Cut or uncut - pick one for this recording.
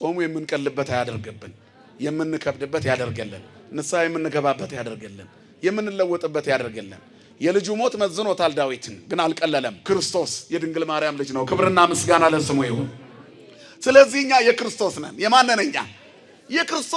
cut